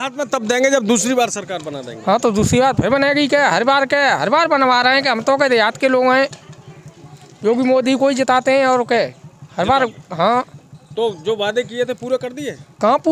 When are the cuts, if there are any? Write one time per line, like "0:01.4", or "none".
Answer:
none